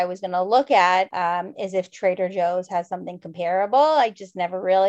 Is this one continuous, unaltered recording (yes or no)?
no